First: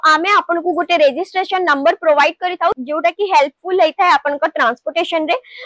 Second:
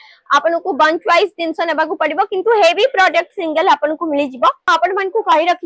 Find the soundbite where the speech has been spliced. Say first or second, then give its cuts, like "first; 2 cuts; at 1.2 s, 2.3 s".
second; 1 cut; at 4.7 s